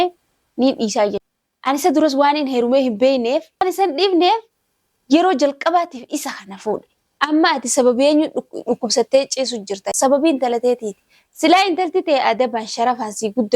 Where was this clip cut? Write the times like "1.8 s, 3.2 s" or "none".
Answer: 3.6 s, 7.0 s

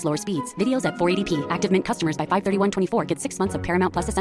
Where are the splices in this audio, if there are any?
none

